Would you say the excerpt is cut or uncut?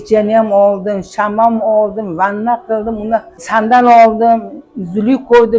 cut